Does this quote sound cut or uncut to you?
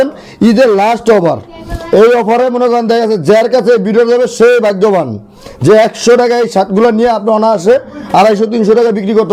uncut